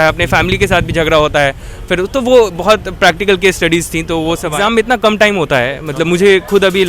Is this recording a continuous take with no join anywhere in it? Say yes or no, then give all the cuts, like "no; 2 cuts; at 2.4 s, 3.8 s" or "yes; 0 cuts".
no; 1 cut; at 4.5 s